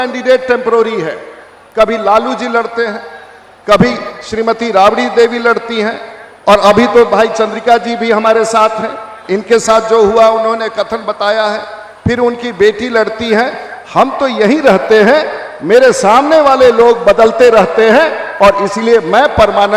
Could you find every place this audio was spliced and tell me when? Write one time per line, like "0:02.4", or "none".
none